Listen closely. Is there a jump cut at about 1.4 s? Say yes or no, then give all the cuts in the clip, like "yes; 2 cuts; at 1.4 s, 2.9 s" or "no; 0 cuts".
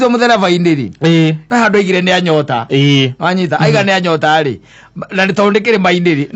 yes; 1 cut; at 1.4 s